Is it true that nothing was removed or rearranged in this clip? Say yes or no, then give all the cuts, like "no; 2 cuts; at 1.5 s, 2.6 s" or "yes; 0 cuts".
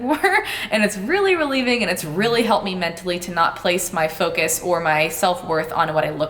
yes; 0 cuts